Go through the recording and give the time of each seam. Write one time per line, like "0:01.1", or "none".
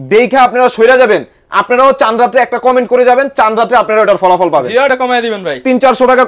0:04.9